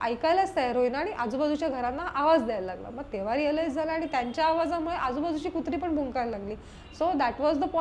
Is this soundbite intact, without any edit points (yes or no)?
yes